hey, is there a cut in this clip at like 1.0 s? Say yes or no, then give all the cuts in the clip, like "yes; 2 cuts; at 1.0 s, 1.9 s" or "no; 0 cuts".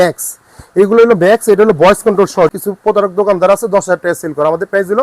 no; 1 cut; at 2.6 s